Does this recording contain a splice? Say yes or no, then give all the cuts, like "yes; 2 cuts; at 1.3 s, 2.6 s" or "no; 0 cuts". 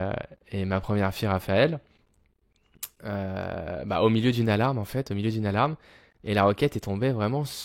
no; 0 cuts